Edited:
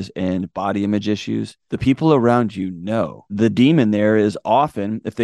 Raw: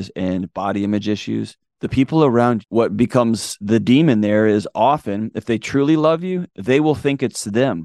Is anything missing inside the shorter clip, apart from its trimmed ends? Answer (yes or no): yes